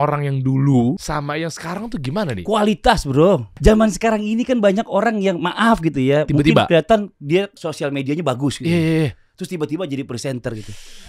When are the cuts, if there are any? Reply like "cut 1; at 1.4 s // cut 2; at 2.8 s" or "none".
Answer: cut 1; at 1.0 s // cut 2; at 3.5 s // cut 3; at 7.6 s